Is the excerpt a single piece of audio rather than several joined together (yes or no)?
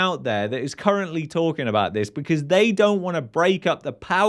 yes